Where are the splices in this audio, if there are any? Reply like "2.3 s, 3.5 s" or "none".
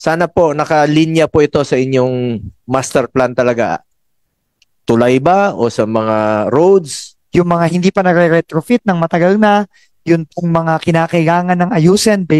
7.1 s